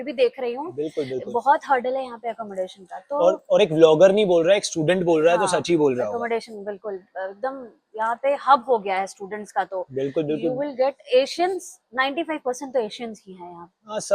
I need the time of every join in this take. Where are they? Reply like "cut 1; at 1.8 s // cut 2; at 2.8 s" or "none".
none